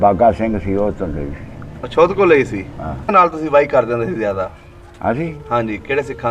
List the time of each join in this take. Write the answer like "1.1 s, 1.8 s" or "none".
3.1 s